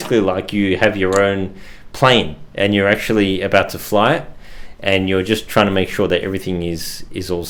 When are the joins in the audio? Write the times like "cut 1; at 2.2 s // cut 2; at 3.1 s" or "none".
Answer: none